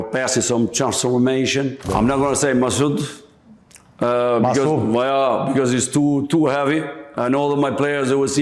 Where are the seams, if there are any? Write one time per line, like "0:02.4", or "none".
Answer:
0:01.8